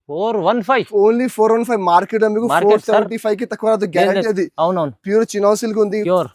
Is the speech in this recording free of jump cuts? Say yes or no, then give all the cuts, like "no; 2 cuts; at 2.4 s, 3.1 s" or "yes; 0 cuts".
yes; 0 cuts